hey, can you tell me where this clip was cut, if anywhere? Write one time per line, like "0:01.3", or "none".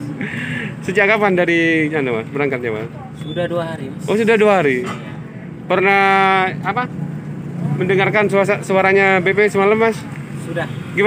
none